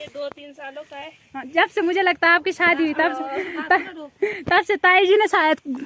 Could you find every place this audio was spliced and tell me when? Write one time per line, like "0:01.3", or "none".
none